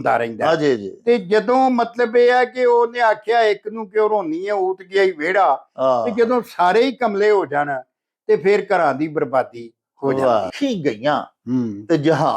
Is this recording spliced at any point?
yes; 1 cut; at 10.5 s

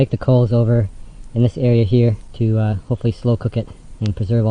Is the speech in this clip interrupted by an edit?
yes; 1 cut; at 2.3 s

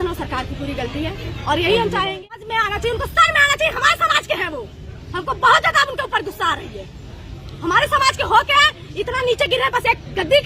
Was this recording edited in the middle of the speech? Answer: yes; 1 cut; at 2.4 s

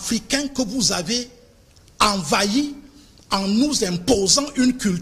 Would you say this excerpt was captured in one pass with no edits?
yes; 0 cuts

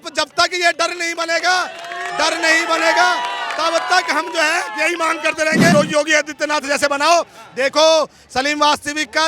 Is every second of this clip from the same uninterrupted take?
no; 1 cut; at 5.7 s

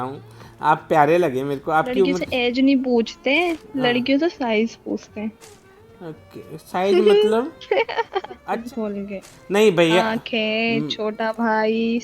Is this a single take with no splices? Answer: no; 1 cut; at 8.5 s

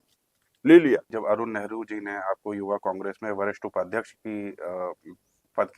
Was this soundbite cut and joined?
yes; 1 cut; at 1.1 s

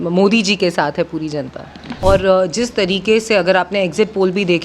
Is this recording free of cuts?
no; 1 cut; at 2.0 s

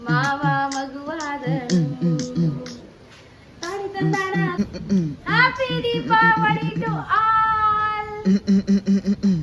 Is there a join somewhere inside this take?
yes; 1 cut; at 4.5 s

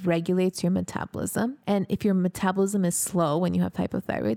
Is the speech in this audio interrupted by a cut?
yes; 1 cut; at 1.6 s

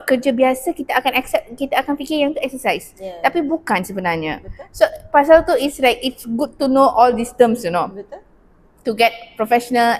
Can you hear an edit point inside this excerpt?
no; 0 cuts

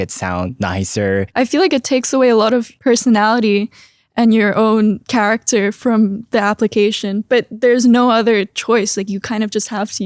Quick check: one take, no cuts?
no; 1 cut; at 1.3 s

